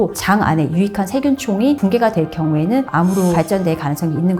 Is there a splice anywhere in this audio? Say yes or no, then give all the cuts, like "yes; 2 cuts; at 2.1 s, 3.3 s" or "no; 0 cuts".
yes; 1 cut; at 3.3 s